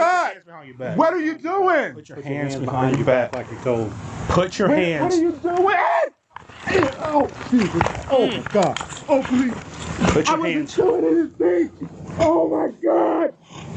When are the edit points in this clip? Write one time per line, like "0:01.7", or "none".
0:04.0